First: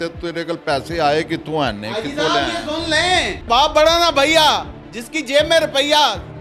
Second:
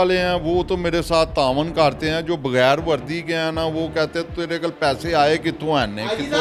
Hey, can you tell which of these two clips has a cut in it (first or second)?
first